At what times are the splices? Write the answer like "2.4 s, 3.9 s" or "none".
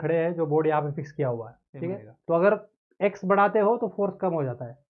2.1 s